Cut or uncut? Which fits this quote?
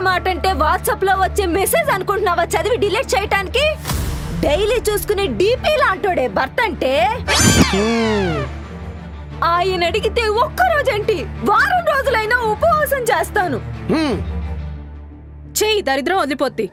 uncut